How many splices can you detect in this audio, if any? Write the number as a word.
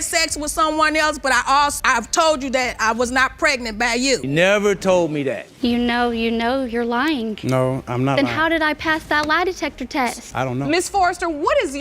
one